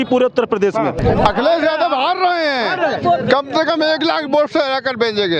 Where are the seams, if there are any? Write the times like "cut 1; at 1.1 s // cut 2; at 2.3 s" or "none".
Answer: cut 1; at 1.0 s